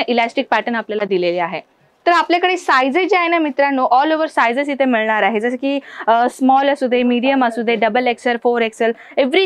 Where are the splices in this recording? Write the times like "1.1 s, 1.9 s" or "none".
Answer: 1.9 s